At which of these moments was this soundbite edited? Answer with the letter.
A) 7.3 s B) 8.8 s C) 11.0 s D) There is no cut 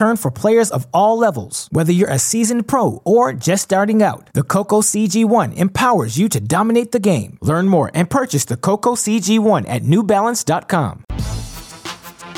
C